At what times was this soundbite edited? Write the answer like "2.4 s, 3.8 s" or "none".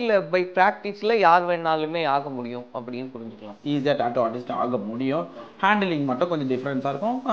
3.5 s